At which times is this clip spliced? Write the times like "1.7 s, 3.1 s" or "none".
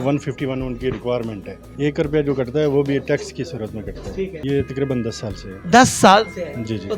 1.8 s, 4.4 s